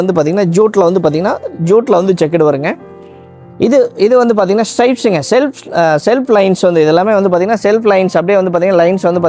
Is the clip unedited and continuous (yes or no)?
yes